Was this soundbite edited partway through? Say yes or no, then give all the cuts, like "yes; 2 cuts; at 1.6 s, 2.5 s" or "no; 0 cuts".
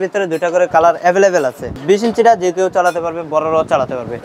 yes; 1 cut; at 1.8 s